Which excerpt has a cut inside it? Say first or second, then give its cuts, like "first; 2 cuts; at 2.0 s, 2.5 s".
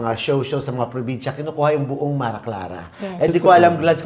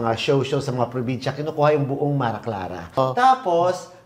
second; 1 cut; at 3.0 s